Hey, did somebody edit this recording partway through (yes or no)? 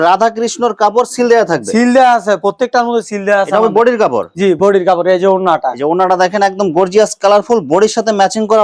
no